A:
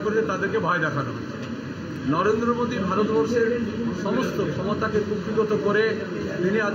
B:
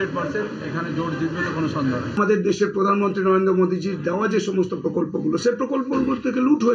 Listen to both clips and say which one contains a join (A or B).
B